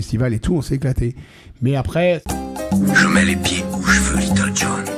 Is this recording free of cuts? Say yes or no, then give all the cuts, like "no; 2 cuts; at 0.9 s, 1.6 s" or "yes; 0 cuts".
no; 1 cut; at 2.3 s